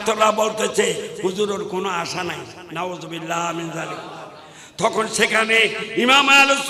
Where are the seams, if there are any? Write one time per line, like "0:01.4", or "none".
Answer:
none